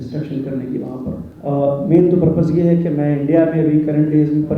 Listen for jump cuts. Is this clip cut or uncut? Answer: cut